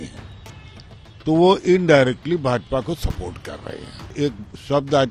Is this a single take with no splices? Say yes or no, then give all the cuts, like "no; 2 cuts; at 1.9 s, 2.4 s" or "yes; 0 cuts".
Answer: no; 1 cut; at 4.1 s